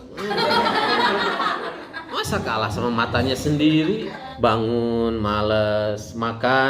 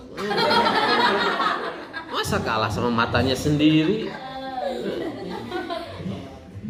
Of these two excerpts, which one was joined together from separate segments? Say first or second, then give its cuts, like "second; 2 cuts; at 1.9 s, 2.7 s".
first; 1 cut; at 4.2 s